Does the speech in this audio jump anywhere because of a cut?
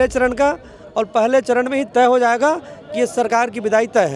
no; 0 cuts

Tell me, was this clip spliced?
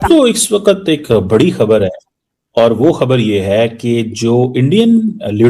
no; 0 cuts

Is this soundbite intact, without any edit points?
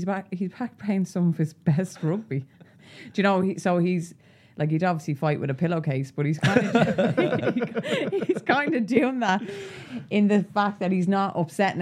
yes; 0 cuts

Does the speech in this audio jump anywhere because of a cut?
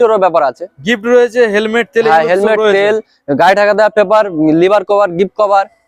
no; 0 cuts

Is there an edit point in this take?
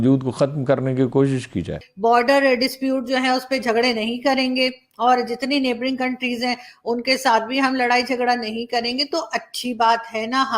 yes; 1 cut; at 1.8 s

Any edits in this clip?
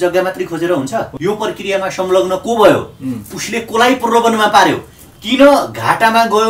yes; 1 cut; at 1.1 s

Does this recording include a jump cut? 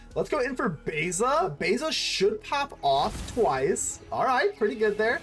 yes; 1 cut; at 1.6 s

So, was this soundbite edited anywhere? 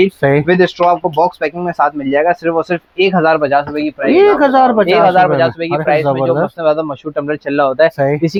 no; 0 cuts

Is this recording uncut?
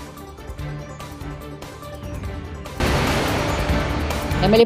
yes; 0 cuts

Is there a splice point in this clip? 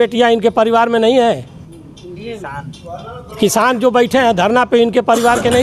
no; 0 cuts

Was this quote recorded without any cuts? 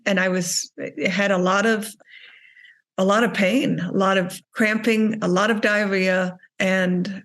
no; 1 cut; at 1.9 s

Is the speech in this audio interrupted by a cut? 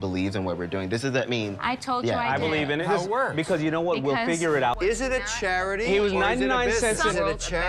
yes; 1 cut; at 4.8 s

